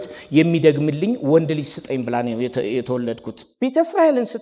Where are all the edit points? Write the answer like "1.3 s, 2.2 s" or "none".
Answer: 3.5 s